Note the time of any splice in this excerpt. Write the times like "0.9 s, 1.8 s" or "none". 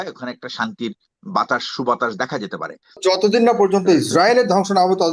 3.0 s